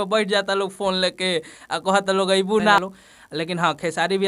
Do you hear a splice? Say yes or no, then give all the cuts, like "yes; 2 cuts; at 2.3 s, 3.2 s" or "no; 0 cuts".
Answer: yes; 1 cut; at 2.8 s